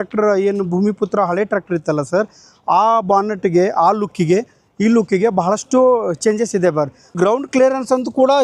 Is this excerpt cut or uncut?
cut